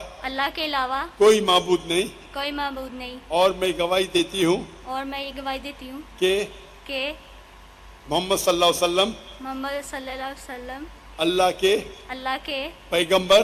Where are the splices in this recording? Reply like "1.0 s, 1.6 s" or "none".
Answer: none